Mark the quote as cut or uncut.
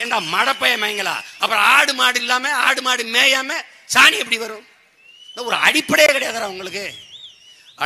cut